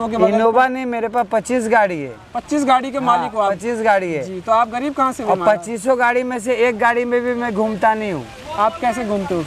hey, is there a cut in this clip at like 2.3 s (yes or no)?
no